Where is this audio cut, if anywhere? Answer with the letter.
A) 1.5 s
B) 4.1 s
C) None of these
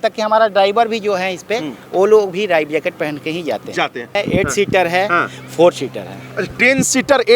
B